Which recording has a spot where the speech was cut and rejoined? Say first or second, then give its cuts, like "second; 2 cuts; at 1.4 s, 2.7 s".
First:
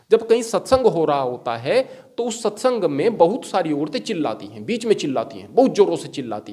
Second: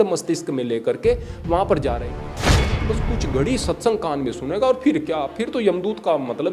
second; 1 cut; at 2.6 s